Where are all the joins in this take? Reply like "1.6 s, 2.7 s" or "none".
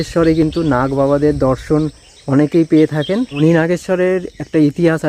3.4 s

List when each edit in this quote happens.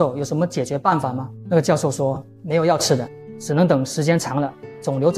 1.3 s, 3.2 s

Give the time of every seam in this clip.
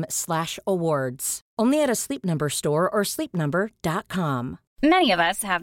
4.6 s

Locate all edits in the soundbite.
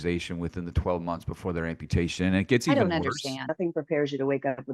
3.5 s

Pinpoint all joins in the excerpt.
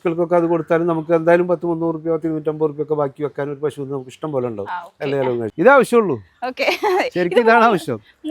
5.1 s

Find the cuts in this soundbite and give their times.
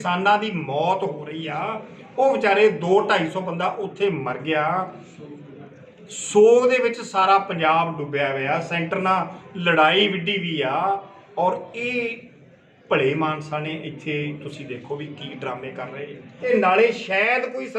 16.5 s

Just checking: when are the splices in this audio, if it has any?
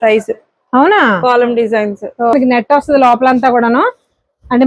2.3 s

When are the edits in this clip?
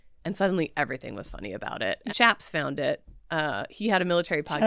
2.0 s

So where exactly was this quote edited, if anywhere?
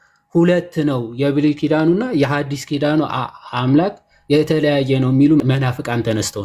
5.4 s

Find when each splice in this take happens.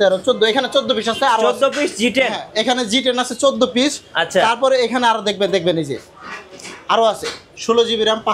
none

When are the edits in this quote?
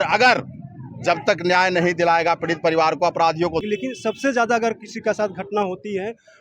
3.6 s

